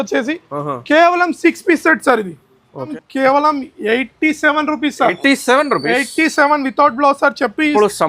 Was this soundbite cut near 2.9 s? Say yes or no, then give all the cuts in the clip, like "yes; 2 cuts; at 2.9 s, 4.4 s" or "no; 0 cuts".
yes; 1 cut; at 2.9 s